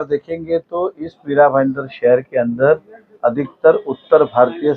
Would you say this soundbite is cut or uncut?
uncut